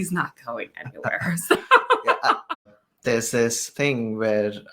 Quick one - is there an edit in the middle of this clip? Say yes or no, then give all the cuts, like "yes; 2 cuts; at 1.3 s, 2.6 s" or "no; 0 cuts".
yes; 2 cuts; at 2.8 s, 3.6 s